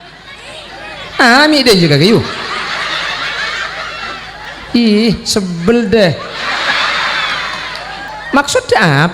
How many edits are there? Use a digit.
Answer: 2